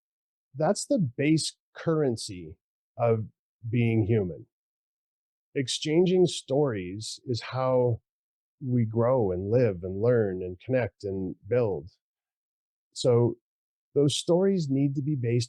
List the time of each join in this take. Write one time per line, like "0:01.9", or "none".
0:13.5